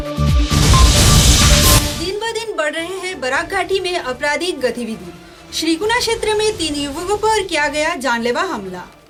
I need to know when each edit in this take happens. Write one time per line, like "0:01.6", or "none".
none